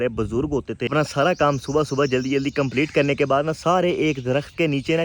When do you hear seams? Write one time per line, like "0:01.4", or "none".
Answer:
0:00.9